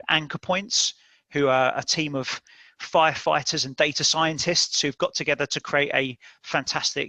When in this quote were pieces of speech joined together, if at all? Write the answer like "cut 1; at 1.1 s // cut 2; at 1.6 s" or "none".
none